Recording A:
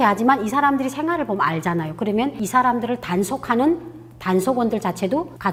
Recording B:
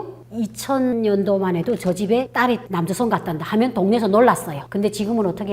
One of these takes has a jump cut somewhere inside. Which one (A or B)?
B